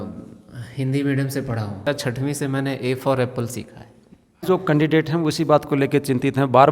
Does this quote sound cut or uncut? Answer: cut